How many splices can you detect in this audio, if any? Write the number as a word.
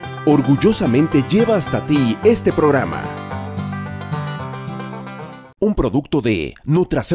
one